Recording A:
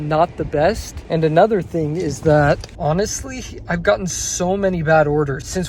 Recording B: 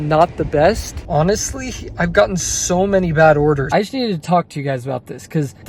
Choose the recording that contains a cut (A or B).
B